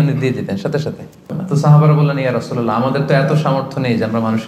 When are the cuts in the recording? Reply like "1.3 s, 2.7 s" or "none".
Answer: 1.4 s